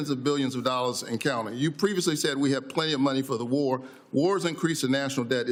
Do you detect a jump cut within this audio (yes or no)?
no